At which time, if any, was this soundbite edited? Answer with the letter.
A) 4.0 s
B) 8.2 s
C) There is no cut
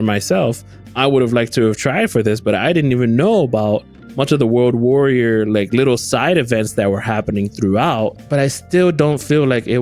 B